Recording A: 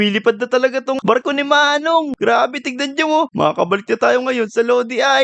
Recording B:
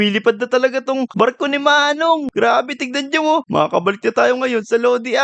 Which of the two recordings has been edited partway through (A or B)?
A